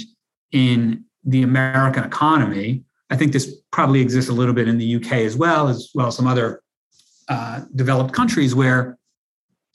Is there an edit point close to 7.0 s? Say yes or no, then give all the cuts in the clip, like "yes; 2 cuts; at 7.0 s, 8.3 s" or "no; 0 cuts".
no; 0 cuts